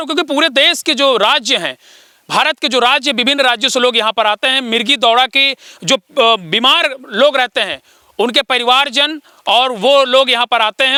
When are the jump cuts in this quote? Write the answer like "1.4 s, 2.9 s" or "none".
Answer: none